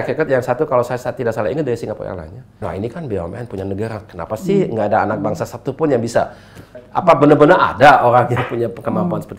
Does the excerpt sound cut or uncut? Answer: cut